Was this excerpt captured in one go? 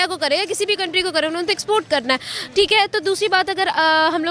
yes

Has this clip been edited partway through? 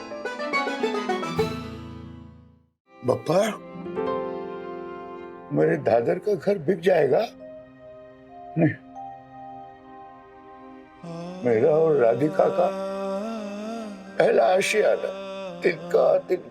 yes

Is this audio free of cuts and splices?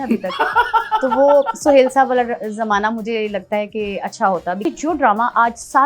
no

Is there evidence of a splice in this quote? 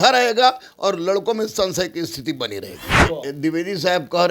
yes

